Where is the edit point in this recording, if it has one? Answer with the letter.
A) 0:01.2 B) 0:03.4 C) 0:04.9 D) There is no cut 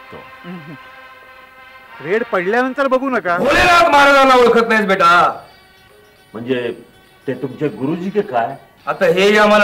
B